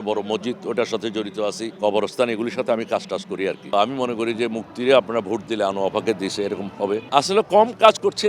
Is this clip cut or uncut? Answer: cut